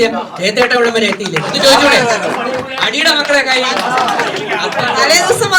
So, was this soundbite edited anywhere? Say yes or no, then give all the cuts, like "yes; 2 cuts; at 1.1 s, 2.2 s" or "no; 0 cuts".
no; 0 cuts